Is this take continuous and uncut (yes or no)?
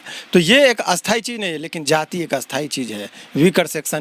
yes